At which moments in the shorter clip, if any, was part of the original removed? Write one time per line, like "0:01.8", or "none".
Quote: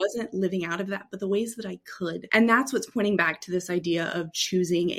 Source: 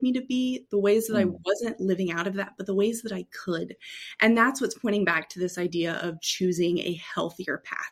0:02.2